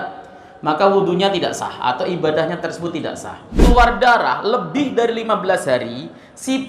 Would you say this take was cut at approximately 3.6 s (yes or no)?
yes